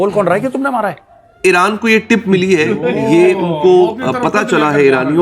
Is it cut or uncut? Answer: cut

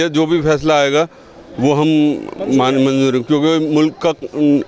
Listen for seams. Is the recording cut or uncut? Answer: uncut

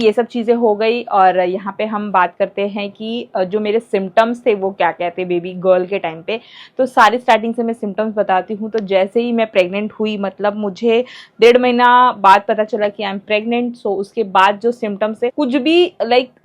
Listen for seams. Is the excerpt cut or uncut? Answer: uncut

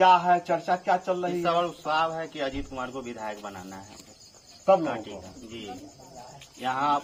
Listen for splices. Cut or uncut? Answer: uncut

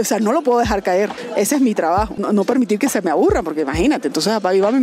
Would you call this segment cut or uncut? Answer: cut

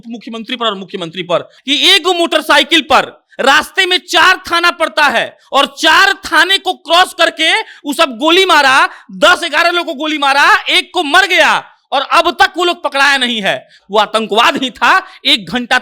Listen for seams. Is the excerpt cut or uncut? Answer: cut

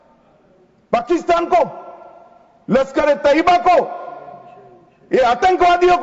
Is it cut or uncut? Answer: uncut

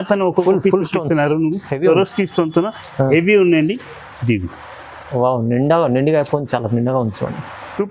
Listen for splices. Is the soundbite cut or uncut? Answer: uncut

